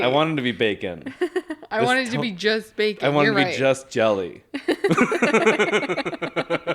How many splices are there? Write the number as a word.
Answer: zero